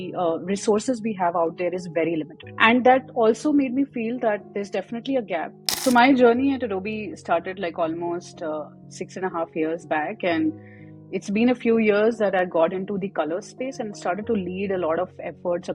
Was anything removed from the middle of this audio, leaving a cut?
yes; 2 cuts; at 2.4 s, 5.7 s

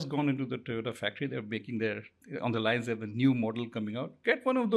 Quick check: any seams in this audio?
no; 0 cuts

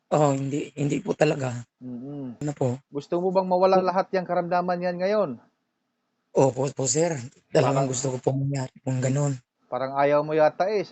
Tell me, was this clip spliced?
yes; 1 cut; at 2.4 s

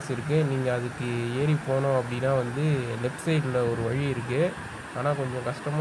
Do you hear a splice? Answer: no; 0 cuts

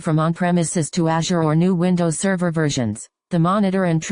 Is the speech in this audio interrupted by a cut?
yes; 1 cut; at 3.1 s

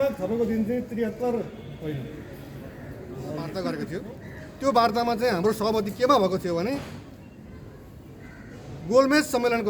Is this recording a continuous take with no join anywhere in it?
no; 1 cut; at 3.5 s

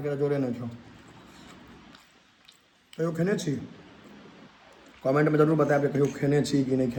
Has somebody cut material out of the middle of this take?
no; 0 cuts

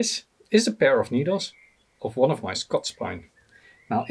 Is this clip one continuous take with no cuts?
yes; 0 cuts

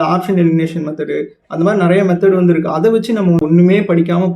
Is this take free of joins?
no; 1 cut; at 3.4 s

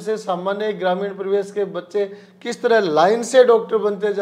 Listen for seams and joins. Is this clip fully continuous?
yes; 0 cuts

